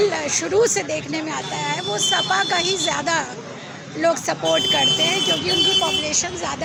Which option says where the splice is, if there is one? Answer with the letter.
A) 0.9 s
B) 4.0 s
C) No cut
C